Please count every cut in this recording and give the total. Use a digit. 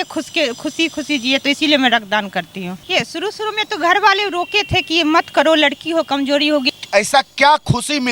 2